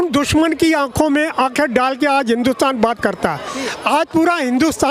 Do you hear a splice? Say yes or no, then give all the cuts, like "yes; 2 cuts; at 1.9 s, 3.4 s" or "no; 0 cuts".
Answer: no; 0 cuts